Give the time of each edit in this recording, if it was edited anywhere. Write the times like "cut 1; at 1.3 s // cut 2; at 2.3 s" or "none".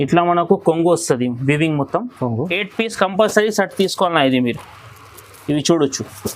cut 1; at 2.5 s